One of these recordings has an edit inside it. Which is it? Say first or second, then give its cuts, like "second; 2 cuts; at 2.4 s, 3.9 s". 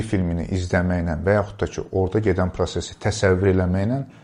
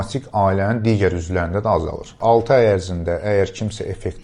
second; 1 cut; at 2.1 s